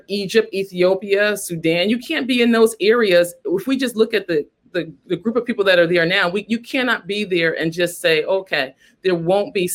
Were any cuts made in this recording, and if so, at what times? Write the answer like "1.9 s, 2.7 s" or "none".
none